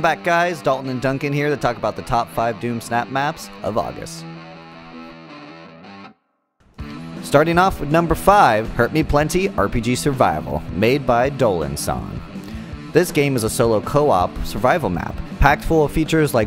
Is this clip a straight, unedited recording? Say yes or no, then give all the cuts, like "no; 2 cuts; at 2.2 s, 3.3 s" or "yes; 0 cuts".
yes; 0 cuts